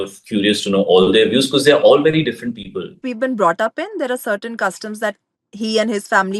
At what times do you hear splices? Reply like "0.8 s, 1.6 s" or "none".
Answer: 3.1 s